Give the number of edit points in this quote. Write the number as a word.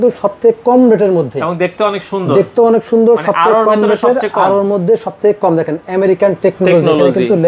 zero